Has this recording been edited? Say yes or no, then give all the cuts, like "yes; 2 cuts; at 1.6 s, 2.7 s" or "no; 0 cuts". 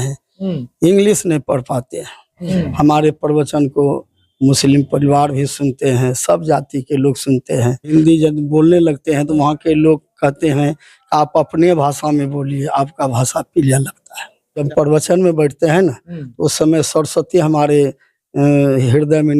yes; 3 cuts; at 2.4 s, 7.9 s, 14.7 s